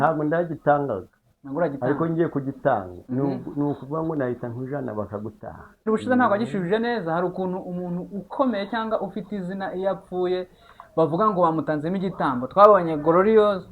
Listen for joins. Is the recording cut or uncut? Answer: cut